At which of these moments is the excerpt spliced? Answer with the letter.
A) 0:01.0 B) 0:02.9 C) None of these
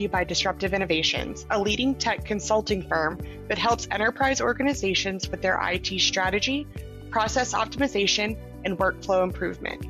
C